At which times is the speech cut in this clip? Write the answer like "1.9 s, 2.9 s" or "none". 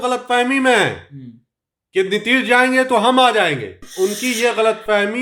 3.9 s